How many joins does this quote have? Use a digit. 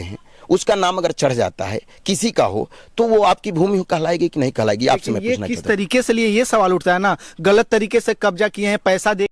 0